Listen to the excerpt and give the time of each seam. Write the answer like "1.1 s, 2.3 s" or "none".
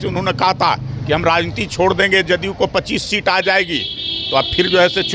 none

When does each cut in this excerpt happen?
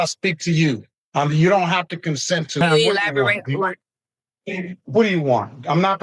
2.6 s

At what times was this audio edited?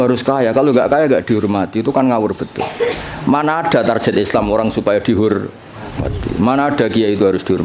none

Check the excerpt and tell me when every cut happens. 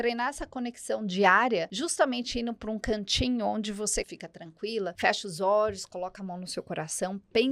1.7 s, 4.4 s

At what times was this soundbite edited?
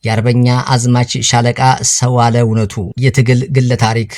2.8 s

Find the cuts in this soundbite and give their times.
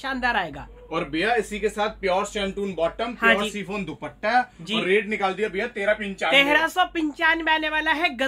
none

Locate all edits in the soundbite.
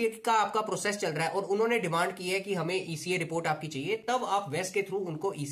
none

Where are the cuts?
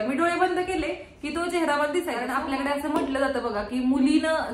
2.3 s

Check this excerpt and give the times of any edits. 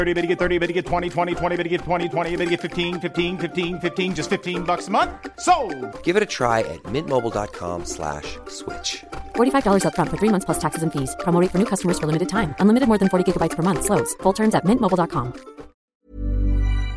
15.9 s

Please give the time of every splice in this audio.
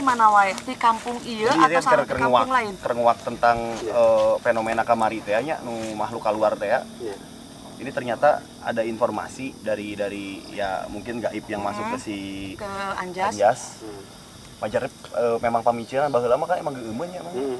none

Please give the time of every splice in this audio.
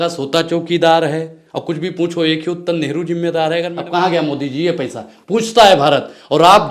3.7 s

